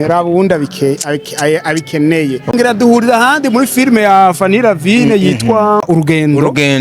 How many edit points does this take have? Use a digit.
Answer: 2